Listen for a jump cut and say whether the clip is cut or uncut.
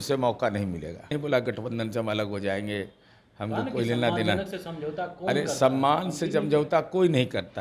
cut